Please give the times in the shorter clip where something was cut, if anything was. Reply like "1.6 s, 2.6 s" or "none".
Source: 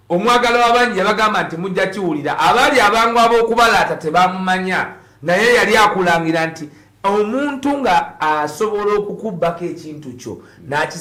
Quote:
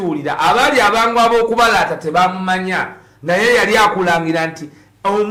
none